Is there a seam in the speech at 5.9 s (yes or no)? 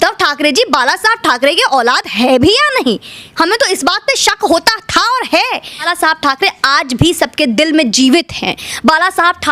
yes